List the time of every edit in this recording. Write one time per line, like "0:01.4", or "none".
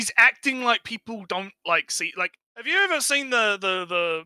0:02.7